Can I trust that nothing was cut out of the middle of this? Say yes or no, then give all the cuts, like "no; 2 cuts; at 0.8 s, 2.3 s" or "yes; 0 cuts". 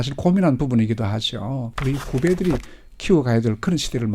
no; 1 cut; at 1.7 s